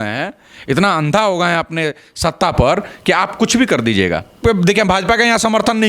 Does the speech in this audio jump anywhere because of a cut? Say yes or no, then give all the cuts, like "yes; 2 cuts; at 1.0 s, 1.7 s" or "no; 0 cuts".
yes; 1 cut; at 4.3 s